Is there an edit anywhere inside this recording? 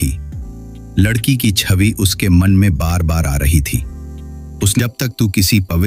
yes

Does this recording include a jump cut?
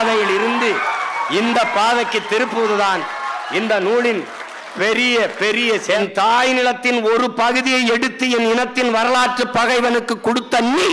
yes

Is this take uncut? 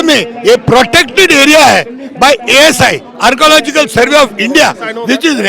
yes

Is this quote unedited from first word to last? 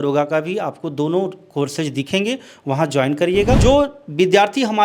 no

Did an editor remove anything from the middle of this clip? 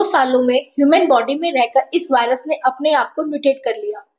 no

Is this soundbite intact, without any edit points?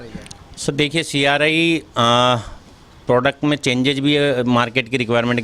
yes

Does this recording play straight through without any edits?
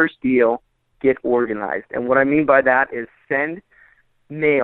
yes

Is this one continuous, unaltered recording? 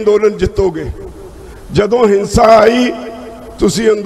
yes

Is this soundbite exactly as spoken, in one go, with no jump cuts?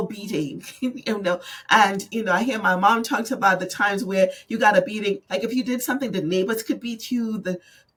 yes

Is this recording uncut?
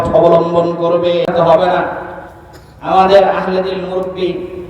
no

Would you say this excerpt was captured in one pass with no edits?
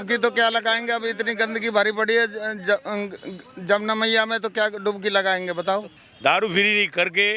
no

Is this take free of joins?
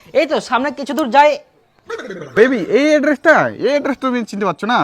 no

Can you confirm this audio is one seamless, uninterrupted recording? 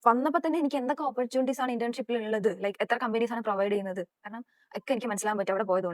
yes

